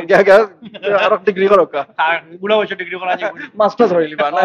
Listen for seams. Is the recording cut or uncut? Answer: uncut